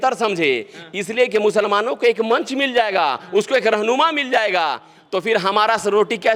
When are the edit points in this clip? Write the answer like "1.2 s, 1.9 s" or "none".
none